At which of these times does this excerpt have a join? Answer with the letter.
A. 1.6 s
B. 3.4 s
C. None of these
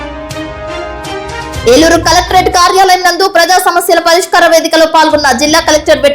A